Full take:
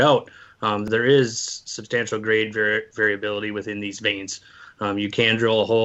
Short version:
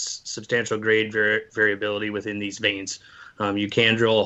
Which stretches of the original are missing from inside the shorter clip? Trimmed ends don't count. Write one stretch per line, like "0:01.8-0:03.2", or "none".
none